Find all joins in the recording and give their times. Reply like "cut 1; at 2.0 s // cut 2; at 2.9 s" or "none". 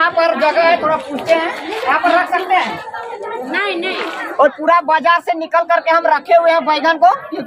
cut 1; at 4.2 s